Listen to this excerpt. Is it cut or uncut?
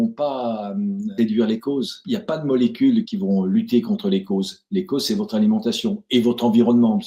cut